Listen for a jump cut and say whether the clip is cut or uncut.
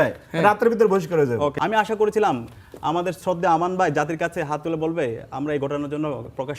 cut